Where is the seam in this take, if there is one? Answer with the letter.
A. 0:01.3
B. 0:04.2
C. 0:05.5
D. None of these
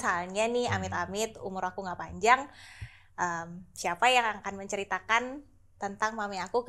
D